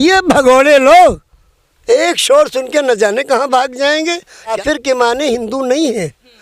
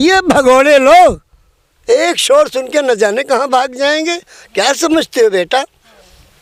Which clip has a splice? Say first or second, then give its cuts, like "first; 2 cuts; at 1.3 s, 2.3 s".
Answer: first; 1 cut; at 4.6 s